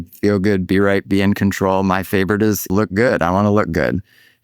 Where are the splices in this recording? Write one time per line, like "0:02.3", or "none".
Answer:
0:02.7